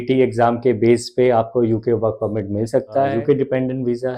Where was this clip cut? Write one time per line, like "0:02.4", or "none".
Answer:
0:03.1